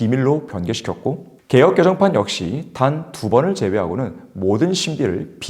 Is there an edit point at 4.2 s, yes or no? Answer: no